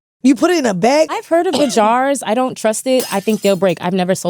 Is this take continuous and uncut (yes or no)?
no